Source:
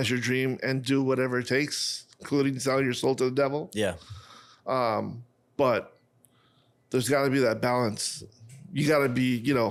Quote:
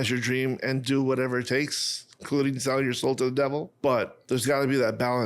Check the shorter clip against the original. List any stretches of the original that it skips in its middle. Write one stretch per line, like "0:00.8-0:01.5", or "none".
0:03.7-0:06.3